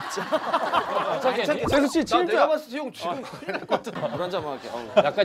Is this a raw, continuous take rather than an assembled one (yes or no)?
no